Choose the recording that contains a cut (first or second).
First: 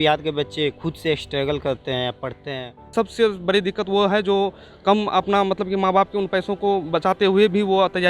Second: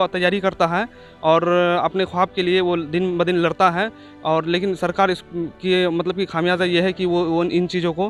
first